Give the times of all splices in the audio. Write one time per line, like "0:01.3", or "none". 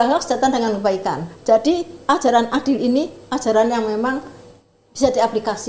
none